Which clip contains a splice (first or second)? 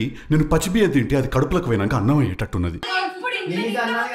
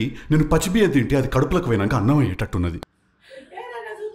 first